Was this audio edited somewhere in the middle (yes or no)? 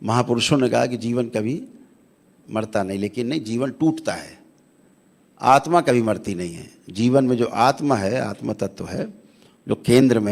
no